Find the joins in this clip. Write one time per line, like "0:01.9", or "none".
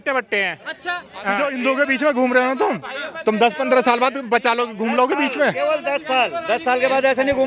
0:01.4